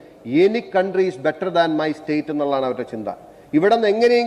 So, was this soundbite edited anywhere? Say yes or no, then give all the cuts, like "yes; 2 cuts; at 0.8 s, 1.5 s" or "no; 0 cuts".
no; 0 cuts